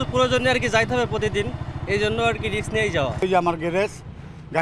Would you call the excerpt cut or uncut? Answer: cut